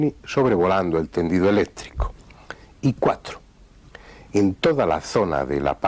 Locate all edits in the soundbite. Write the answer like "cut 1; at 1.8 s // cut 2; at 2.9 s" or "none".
none